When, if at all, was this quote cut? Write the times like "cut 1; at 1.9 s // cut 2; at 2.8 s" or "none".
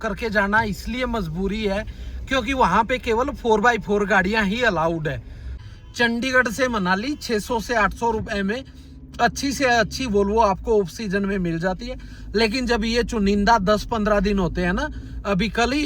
cut 1; at 5.6 s